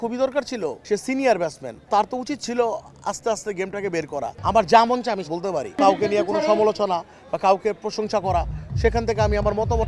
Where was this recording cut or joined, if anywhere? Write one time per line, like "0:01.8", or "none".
0:00.8
0:04.3
0:05.8